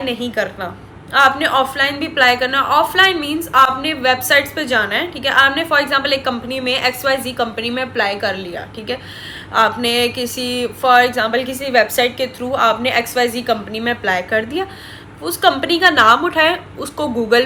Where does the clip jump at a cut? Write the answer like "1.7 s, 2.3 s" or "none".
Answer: none

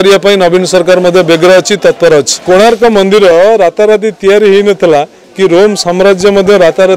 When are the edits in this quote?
2.4 s

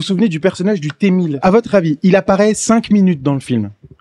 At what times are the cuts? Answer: 1.4 s

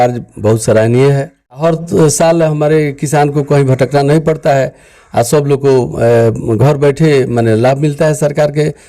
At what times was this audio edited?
1.6 s

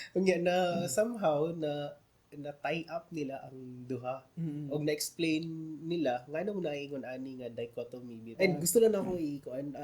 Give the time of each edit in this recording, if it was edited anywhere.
8.2 s

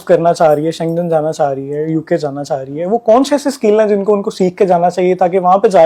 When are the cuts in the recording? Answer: none

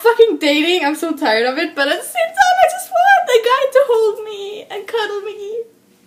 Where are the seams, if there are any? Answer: none

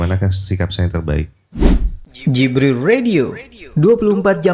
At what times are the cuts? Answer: 1.4 s

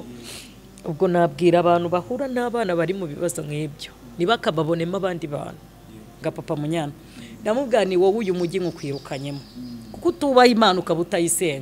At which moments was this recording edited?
6.2 s

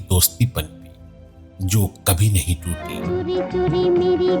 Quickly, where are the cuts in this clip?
2.9 s

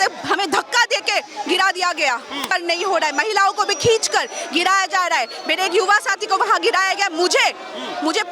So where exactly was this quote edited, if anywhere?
2.5 s

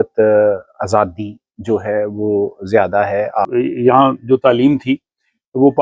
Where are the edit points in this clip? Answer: 3.4 s

